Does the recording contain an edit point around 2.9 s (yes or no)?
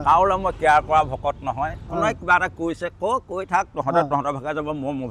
no